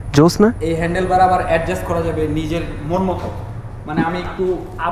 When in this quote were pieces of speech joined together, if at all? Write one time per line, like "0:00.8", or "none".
none